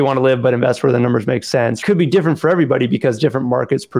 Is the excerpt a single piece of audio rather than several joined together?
no; 1 cut; at 1.8 s

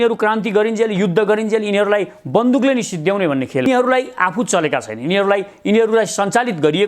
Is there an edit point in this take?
yes; 1 cut; at 3.7 s

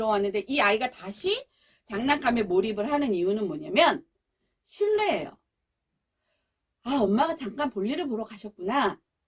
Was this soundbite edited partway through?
no; 0 cuts

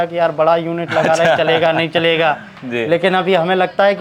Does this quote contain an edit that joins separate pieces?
no; 0 cuts

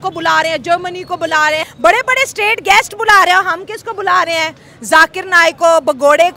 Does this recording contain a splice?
yes; 1 cut; at 1.7 s

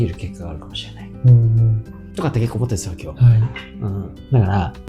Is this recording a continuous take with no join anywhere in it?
yes; 0 cuts

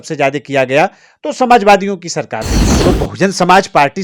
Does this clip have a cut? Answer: yes; 1 cut; at 2.6 s

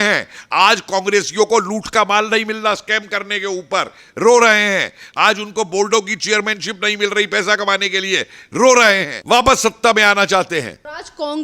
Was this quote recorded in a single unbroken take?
yes; 0 cuts

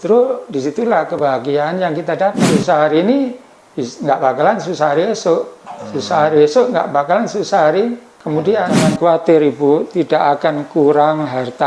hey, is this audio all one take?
no; 2 cuts; at 2.4 s, 8.8 s

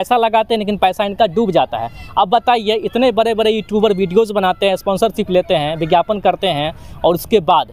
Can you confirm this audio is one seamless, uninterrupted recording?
yes; 0 cuts

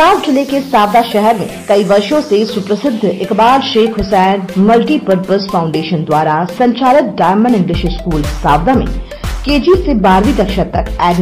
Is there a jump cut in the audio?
no; 0 cuts

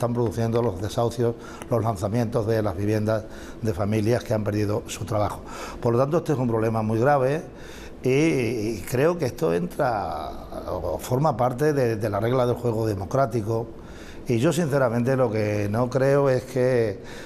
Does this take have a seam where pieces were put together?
no; 0 cuts

